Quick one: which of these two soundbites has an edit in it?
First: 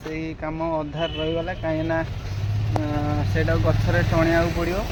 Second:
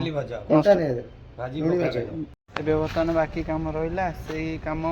second; 1 cut; at 2.2 s

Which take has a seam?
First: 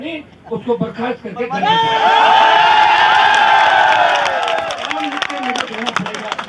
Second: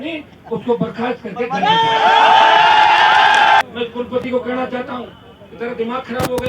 second; 1 cut; at 3.6 s

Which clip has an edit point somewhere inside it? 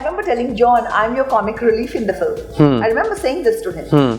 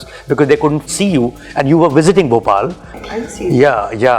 second; 2 cuts; at 0.9 s, 2.9 s

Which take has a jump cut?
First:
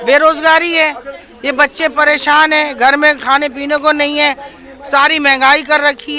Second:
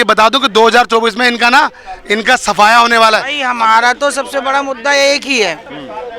second; 1 cut; at 3.4 s

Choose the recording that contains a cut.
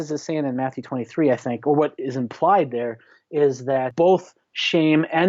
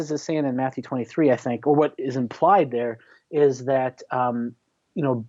first; 1 cut; at 3.9 s

